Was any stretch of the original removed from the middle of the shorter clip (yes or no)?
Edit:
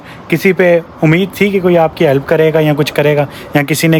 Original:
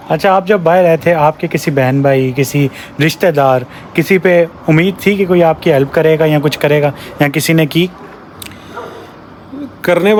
no